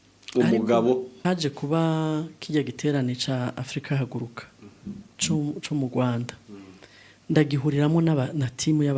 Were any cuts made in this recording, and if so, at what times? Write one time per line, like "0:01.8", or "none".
0:01.1